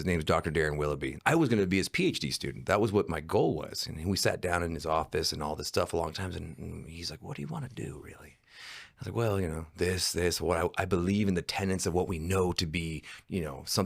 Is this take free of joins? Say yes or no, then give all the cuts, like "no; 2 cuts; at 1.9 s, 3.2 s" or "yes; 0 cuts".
no; 1 cut; at 1.1 s